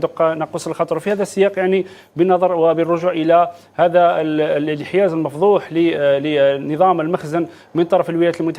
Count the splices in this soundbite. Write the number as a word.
zero